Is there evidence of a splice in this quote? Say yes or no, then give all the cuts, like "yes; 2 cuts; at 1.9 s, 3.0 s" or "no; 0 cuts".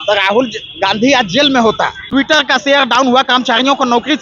yes; 1 cut; at 2.0 s